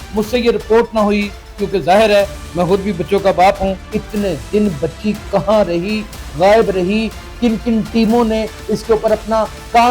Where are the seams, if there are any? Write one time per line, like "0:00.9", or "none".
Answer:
0:03.8